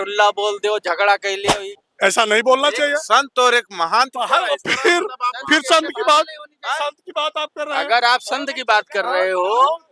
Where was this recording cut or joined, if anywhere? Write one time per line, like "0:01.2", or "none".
0:01.4